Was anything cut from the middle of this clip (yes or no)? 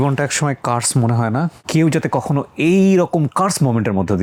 no